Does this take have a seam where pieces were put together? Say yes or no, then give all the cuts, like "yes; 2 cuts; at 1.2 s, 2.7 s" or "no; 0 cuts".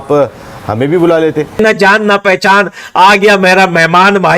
yes; 1 cut; at 1.6 s